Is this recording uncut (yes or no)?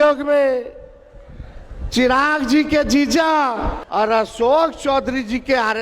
no